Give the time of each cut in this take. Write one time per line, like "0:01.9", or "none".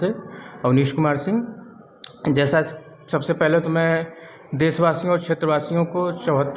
none